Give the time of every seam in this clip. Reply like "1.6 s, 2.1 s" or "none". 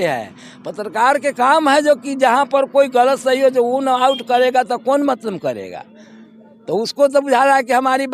none